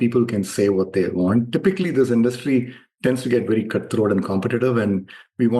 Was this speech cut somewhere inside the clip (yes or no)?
no